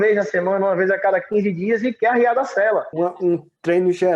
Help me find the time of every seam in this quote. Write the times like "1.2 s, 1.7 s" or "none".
2.9 s